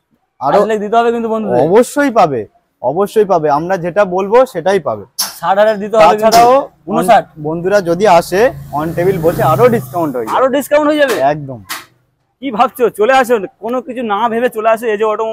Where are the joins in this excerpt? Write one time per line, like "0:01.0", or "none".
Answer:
none